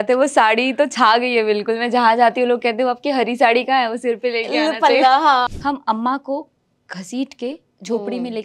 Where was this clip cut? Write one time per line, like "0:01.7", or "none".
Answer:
0:05.5